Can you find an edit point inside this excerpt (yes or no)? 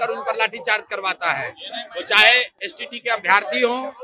no